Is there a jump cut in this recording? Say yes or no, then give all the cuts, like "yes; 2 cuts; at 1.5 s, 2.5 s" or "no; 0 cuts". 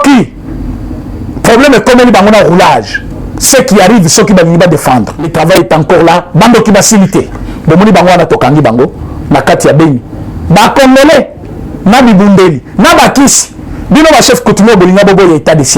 yes; 1 cut; at 5.3 s